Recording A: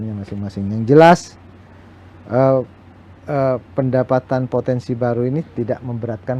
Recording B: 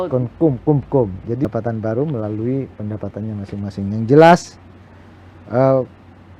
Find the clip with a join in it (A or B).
B